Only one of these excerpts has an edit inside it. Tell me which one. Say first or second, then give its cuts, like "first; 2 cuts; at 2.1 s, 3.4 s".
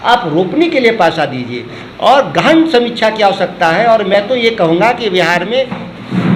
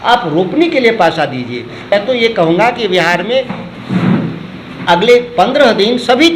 second; 1 cut; at 1.9 s